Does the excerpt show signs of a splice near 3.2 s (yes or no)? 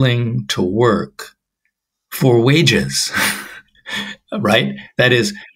no